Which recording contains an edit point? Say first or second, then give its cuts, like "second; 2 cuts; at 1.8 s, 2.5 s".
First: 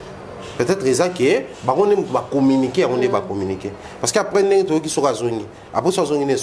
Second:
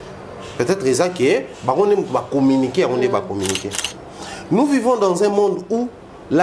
second; 1 cut; at 3.8 s